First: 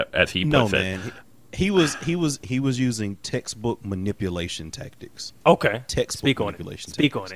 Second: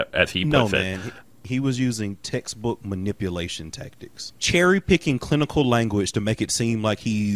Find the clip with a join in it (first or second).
second